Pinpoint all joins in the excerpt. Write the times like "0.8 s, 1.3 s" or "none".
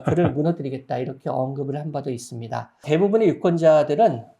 2.8 s